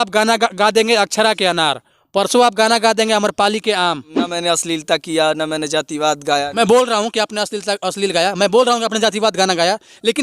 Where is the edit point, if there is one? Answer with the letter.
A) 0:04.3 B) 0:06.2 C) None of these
A